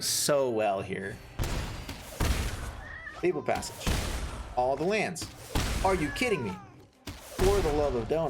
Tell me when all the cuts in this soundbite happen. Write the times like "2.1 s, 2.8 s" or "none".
1.3 s